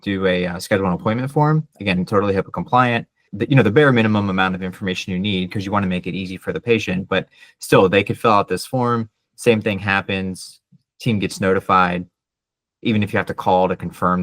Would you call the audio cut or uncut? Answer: cut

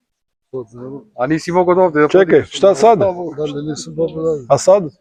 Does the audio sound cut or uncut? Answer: uncut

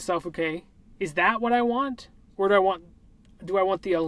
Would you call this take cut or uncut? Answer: uncut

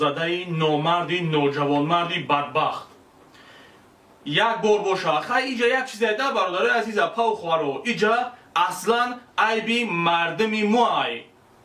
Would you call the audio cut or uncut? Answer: uncut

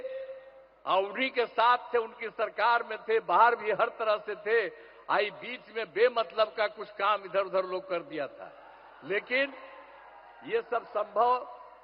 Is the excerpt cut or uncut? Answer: uncut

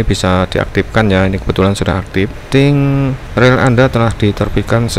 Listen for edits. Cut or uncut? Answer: cut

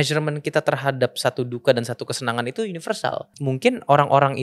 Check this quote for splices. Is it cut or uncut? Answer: cut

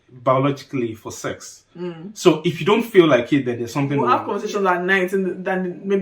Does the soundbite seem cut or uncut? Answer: cut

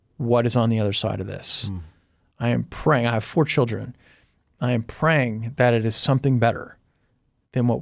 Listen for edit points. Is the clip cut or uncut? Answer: uncut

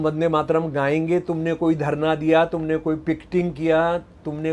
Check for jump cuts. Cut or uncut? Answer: uncut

